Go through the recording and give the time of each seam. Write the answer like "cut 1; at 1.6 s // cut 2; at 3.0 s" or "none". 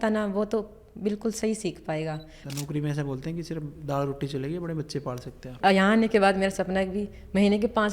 cut 1; at 2.4 s // cut 2; at 5.5 s